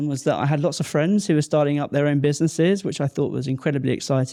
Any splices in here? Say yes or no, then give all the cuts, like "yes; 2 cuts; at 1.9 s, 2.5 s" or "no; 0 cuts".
no; 0 cuts